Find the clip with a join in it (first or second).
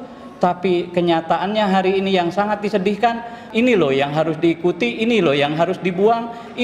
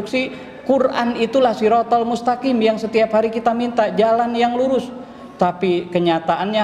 first